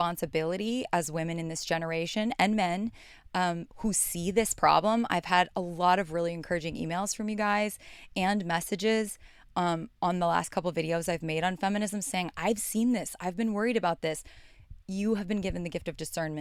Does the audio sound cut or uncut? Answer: uncut